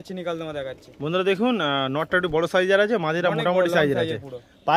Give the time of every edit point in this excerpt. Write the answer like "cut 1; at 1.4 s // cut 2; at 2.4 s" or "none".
none